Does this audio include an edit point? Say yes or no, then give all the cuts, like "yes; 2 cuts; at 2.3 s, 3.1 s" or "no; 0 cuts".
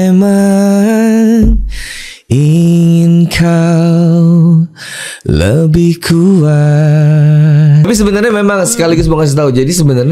yes; 1 cut; at 7.9 s